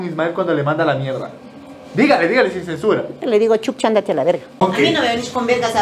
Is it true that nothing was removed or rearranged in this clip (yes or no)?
no